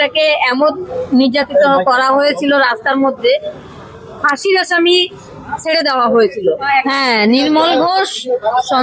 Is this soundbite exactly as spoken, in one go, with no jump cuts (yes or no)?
no